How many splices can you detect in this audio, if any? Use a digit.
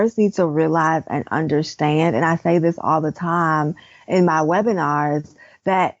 0